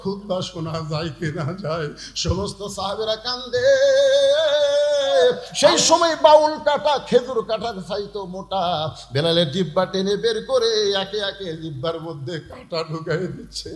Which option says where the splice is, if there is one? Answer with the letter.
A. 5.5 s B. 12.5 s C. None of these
A